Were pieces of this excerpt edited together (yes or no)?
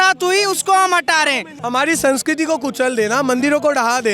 yes